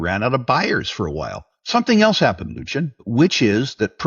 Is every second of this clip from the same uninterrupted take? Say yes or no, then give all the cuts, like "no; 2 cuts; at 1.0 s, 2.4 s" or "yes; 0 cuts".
no; 1 cut; at 3.1 s